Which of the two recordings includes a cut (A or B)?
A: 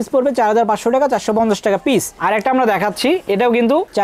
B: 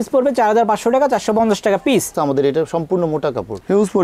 B